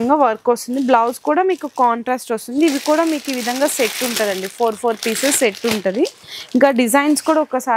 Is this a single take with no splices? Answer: yes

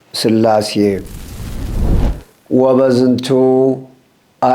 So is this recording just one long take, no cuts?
no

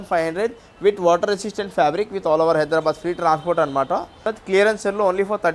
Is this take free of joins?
no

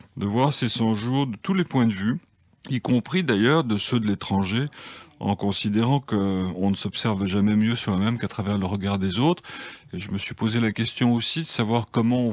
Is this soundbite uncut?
yes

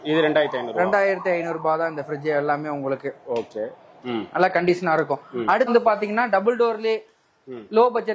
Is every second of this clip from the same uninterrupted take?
no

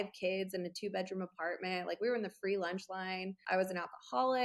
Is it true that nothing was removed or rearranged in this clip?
no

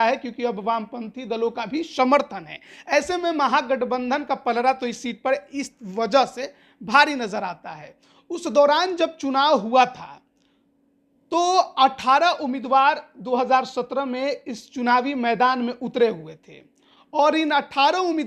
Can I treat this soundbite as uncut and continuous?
yes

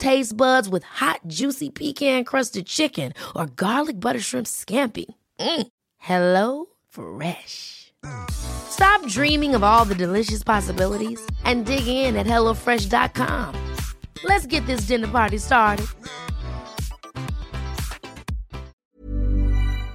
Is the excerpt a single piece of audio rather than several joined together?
no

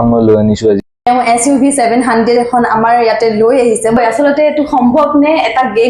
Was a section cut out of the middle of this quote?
yes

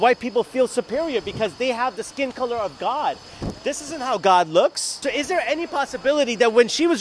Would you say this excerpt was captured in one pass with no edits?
no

